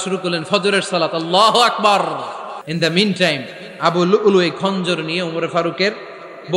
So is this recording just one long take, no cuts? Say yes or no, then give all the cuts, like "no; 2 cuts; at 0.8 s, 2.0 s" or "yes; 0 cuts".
no; 1 cut; at 2.6 s